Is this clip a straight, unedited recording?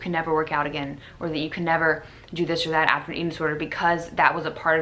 yes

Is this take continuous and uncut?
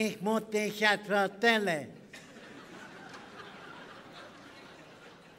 no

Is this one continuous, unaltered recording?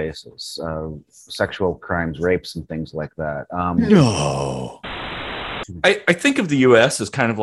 no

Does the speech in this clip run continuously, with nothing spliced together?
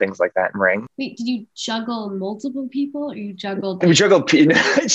no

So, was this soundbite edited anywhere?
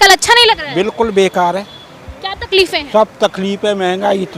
no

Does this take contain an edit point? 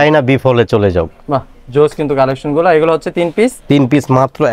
no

